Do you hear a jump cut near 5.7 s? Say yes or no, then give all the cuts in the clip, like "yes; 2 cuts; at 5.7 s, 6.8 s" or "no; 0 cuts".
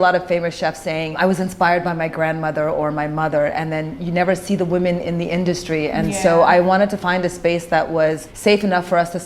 no; 2 cuts; at 1.2 s, 8.3 s